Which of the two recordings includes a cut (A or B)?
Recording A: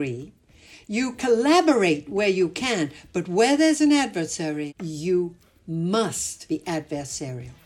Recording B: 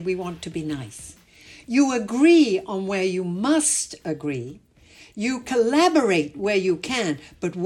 A